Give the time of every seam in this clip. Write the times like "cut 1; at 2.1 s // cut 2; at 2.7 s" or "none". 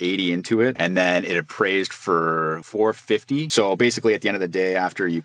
cut 1; at 2.6 s // cut 2; at 3.5 s

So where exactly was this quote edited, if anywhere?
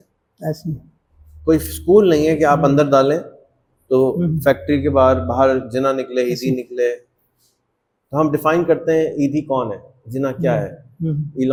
none

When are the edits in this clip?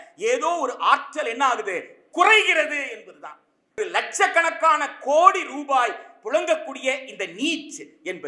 cut 1; at 3.8 s

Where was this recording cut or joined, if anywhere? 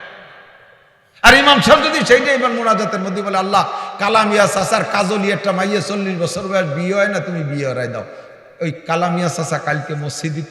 none

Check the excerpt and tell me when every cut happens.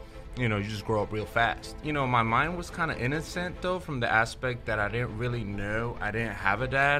cut 1; at 1.8 s

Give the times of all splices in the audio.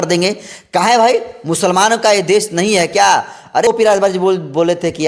cut 1; at 3.7 s

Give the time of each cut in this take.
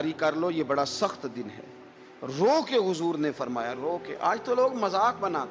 none

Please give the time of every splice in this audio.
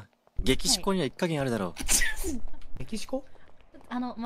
none

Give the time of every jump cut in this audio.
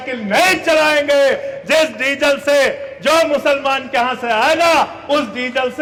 none

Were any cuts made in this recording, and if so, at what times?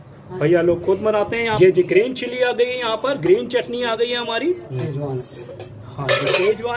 cut 1; at 1.5 s // cut 2; at 4.8 s

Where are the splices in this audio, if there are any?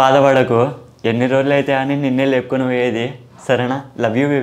none

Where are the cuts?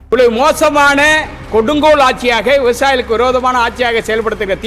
none

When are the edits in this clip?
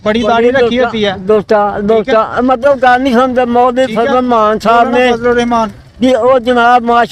none

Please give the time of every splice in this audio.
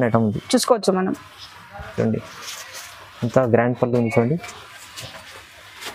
none

